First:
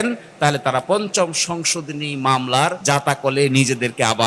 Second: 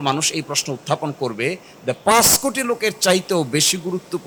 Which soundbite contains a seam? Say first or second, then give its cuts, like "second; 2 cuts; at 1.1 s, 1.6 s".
first; 1 cut; at 2.8 s